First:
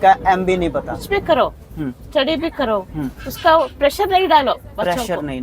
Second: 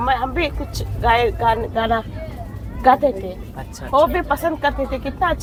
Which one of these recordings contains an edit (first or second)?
first